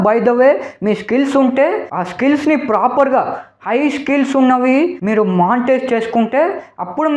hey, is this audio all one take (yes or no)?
yes